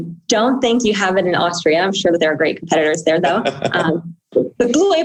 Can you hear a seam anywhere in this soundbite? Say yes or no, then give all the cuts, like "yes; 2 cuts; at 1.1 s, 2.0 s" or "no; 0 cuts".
no; 0 cuts